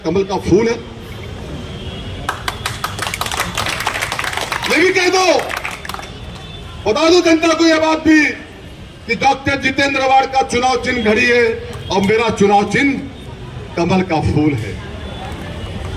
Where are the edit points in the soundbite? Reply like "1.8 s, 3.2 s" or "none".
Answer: none